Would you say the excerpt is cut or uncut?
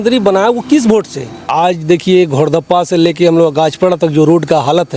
cut